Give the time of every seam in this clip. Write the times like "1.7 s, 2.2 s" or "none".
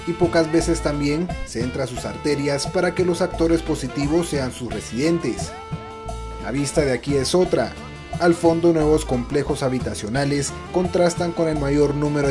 none

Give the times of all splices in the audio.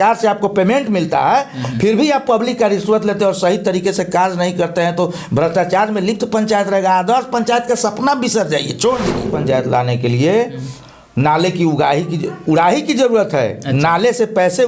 9.3 s

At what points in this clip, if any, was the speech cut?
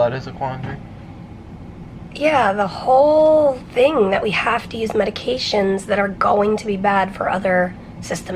none

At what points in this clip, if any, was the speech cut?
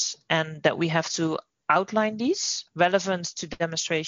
2.6 s

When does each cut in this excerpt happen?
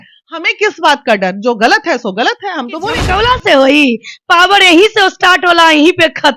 3.1 s

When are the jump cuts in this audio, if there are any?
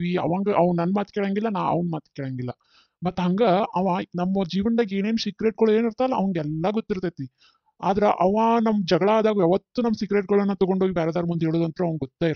none

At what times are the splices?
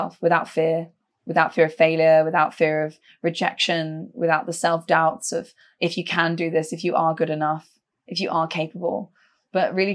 none

